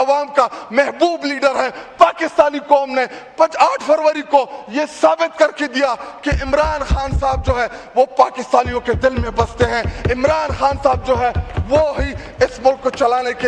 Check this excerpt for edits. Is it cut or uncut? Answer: uncut